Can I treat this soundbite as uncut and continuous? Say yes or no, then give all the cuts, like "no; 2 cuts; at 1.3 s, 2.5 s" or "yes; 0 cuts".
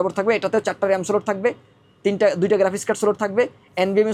yes; 0 cuts